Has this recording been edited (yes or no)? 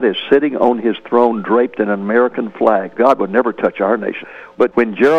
yes